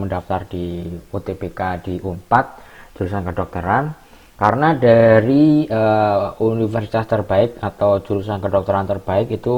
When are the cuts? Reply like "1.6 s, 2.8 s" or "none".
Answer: none